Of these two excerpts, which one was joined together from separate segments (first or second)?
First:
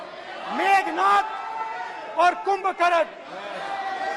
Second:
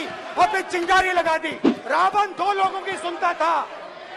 second